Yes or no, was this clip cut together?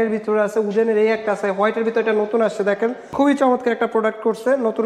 yes